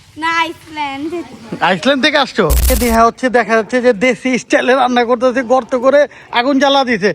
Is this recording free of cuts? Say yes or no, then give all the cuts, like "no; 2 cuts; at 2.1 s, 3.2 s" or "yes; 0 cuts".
no; 1 cut; at 2.7 s